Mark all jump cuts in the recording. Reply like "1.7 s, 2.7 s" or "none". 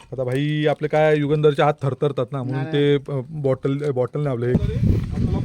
4.5 s